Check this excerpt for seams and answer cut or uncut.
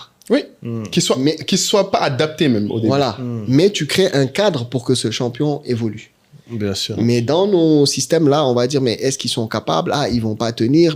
uncut